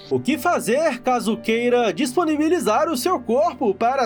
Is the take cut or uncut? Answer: uncut